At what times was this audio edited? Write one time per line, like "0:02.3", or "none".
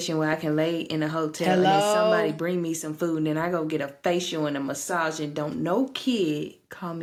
none